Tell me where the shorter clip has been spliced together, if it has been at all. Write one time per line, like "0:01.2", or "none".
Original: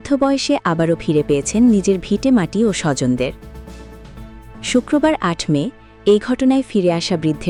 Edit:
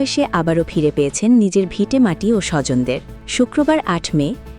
0:03.2